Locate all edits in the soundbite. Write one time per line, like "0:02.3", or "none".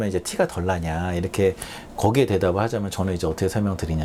none